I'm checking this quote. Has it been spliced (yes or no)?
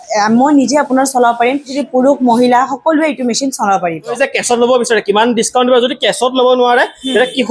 yes